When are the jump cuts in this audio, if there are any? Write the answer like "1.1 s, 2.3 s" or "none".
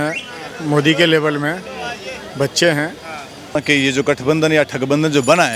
3.6 s